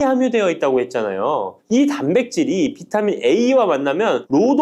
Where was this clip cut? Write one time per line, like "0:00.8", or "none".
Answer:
none